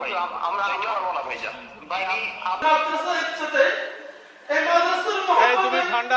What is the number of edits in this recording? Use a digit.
1